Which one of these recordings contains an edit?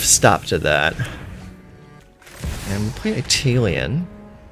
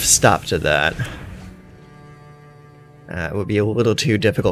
first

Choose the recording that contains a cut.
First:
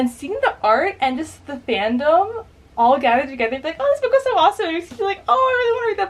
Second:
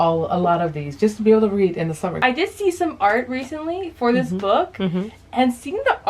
second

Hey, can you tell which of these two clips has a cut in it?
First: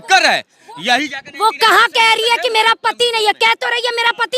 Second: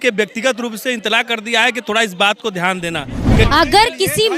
second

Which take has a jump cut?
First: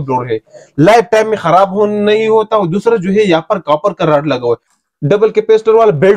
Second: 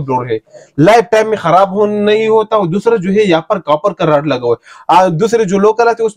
first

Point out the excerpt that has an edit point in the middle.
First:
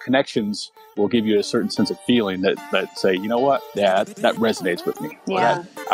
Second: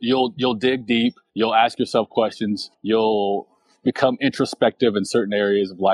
second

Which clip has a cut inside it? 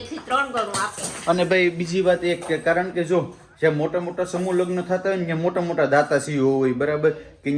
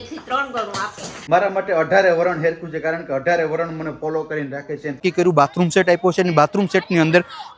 second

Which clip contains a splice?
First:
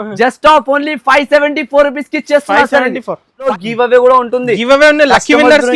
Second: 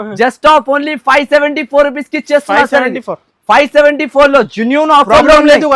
first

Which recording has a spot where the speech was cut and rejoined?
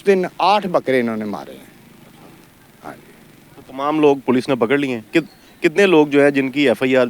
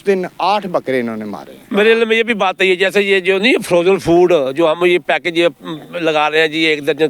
second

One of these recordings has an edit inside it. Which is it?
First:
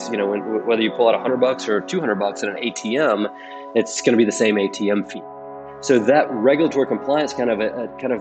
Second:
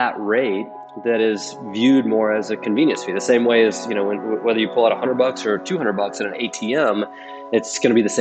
first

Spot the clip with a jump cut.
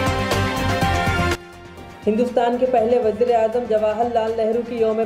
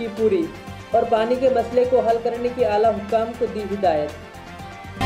first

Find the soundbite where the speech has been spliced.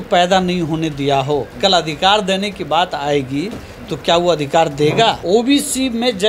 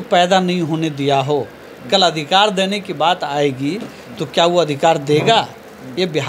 first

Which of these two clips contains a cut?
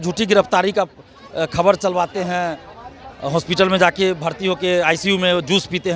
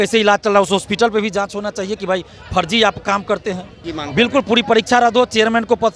second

